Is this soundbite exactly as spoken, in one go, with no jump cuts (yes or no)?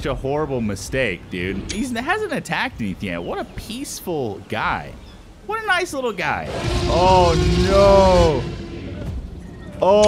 no